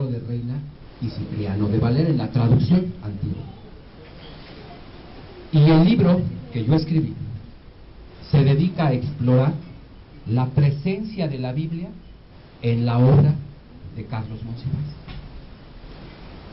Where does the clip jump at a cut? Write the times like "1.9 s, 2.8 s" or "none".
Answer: none